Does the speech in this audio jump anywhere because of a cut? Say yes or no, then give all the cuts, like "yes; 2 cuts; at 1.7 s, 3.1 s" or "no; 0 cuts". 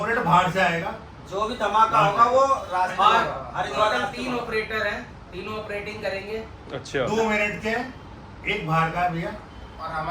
no; 0 cuts